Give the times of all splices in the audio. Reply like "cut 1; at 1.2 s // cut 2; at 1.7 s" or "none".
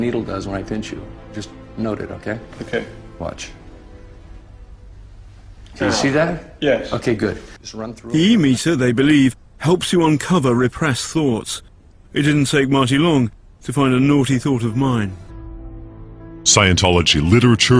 cut 1; at 11.4 s